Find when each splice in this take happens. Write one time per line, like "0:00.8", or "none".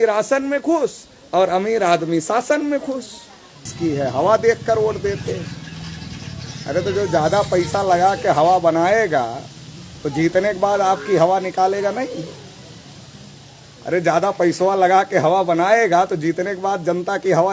0:03.7